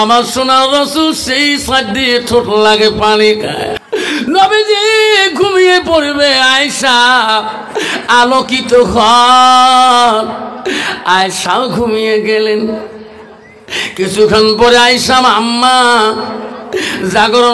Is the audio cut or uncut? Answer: cut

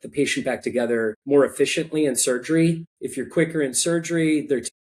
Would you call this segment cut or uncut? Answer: uncut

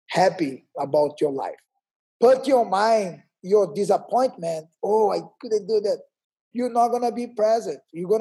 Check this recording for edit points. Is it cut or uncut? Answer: cut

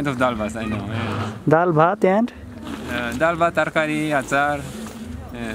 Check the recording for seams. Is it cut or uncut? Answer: uncut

